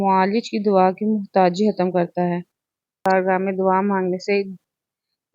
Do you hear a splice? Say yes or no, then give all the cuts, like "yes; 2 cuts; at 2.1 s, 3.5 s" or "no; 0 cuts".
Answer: yes; 1 cut; at 3.0 s